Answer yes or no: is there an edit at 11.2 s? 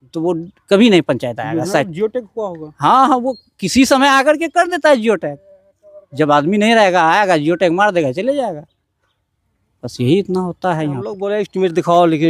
yes